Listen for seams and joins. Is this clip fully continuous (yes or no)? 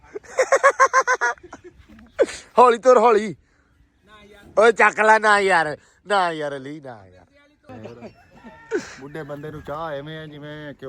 no